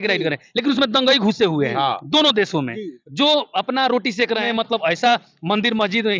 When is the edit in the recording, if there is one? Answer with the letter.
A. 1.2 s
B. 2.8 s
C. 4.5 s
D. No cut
C